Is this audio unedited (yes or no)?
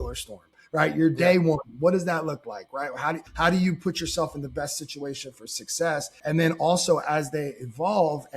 no